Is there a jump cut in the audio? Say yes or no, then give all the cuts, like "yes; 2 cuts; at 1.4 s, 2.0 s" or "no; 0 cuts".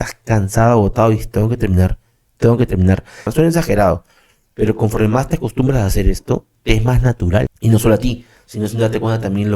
yes; 2 cuts; at 3.3 s, 7.5 s